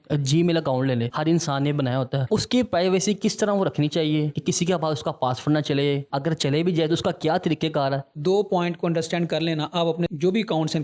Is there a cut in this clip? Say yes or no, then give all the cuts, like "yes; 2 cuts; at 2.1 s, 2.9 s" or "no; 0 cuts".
yes; 1 cut; at 8.1 s